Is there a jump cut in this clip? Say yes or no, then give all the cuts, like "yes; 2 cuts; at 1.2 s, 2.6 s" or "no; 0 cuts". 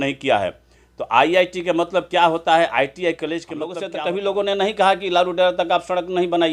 yes; 1 cut; at 3.8 s